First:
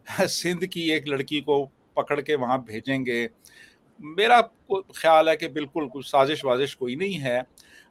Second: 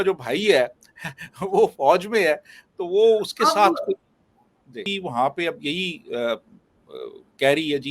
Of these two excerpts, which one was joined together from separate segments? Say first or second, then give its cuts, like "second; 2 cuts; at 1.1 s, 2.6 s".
second; 1 cut; at 4.8 s